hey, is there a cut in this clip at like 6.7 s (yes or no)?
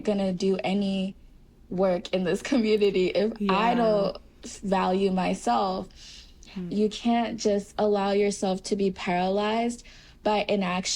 yes